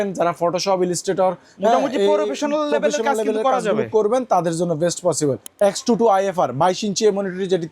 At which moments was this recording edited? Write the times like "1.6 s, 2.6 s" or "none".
5.4 s